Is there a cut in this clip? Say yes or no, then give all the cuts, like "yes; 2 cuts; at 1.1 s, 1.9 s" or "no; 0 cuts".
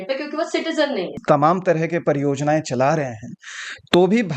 yes; 1 cut; at 1.2 s